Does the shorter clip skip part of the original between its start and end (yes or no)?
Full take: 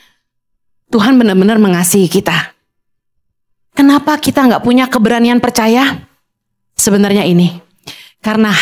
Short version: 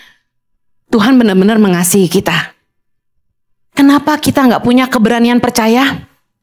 no